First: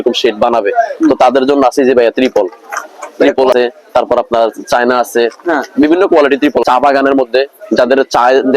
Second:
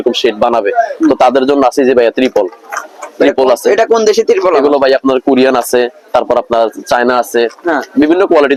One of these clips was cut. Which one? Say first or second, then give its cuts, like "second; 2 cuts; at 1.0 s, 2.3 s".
first; 2 cuts; at 3.5 s, 6.6 s